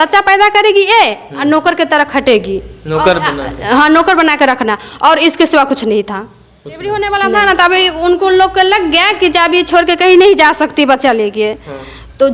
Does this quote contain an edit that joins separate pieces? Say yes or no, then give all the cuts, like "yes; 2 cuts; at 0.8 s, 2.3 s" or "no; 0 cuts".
yes; 1 cut; at 6.8 s